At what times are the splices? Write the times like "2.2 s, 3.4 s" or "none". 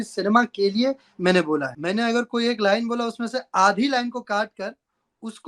1.7 s